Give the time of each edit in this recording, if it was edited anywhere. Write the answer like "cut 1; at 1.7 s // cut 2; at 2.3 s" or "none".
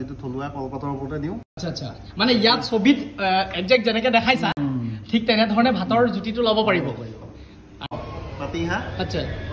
cut 1; at 7.9 s